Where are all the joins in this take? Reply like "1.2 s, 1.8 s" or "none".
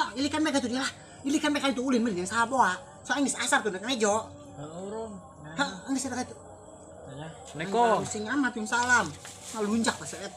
none

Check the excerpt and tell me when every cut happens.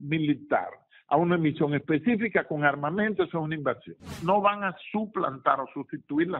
4.1 s

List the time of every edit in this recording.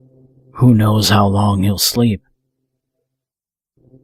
none

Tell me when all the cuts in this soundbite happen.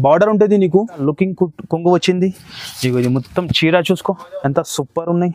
1.0 s

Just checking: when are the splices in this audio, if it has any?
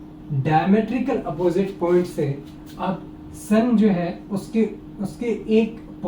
none

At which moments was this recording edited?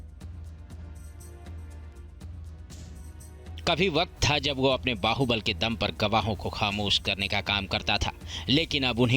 3.5 s

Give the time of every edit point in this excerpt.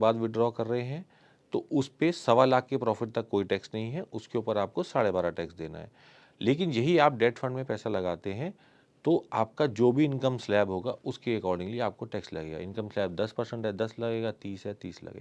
none

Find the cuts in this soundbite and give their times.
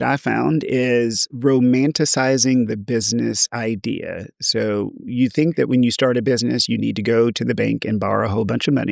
1.3 s

